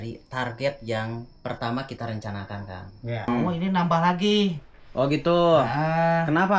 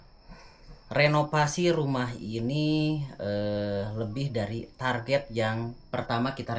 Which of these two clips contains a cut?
first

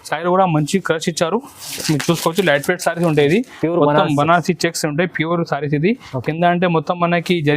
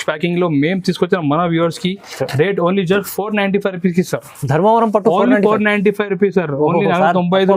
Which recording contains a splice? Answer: first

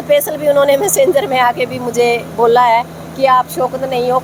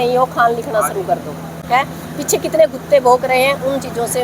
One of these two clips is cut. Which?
second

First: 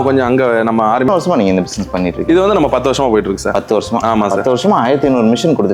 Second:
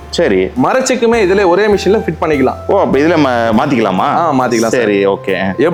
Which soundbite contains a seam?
first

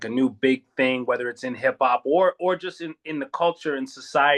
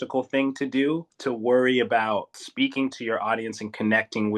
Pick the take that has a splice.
second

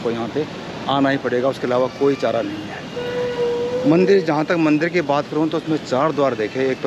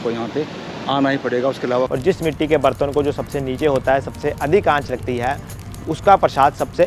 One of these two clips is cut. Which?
second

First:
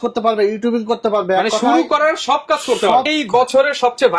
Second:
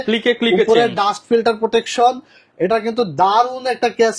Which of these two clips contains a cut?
first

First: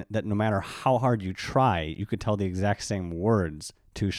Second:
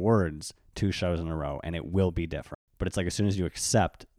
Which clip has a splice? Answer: second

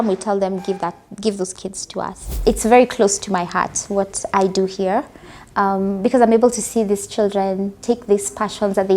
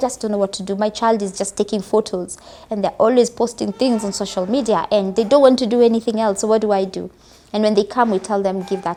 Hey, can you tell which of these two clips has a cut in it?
first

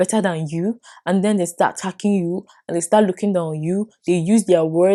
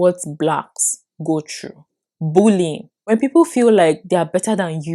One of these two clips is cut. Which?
second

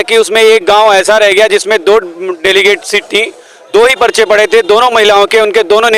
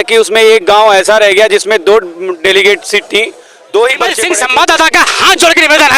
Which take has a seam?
second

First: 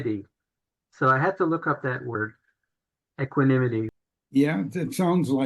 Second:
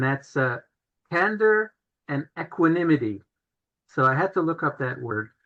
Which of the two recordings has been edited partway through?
first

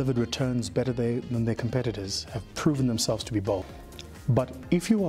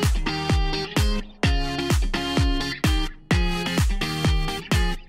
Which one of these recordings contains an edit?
first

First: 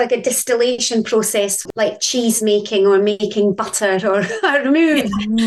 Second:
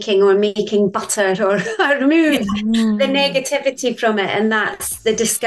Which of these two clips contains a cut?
first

